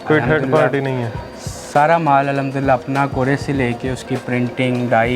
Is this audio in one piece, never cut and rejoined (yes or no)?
yes